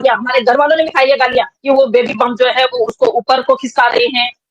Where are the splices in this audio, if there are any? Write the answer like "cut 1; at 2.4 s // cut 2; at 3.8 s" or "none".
cut 1; at 1.5 s